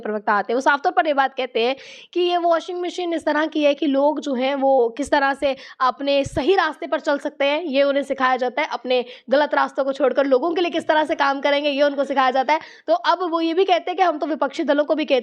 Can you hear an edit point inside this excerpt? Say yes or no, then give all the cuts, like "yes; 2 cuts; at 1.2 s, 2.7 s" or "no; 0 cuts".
no; 0 cuts